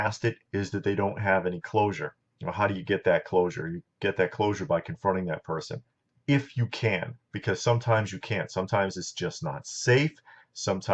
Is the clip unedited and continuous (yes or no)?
no